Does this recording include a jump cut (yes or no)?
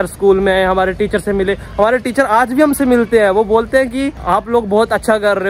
no